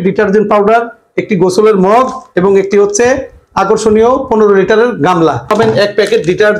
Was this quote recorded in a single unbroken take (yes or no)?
no